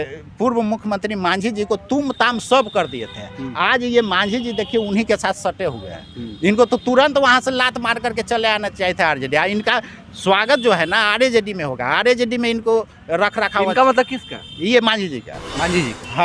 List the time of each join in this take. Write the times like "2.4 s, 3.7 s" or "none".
none